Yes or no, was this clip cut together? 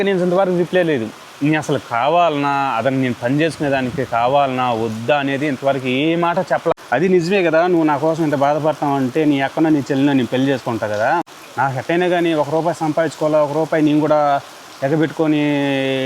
yes